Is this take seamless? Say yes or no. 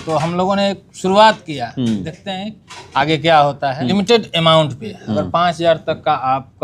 no